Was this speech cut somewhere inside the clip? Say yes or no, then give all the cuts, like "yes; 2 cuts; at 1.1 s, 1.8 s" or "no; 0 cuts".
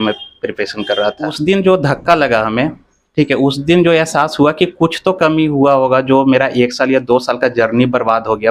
yes; 1 cut; at 1.4 s